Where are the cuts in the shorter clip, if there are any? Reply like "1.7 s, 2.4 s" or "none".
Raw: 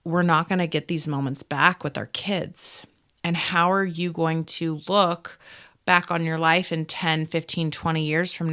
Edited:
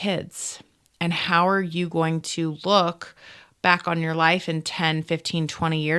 none